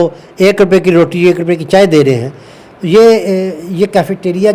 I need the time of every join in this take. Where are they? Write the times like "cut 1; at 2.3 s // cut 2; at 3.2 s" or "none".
none